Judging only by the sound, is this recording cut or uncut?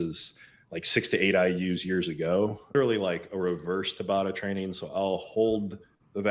cut